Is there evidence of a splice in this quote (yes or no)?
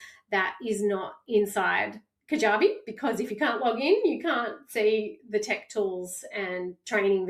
no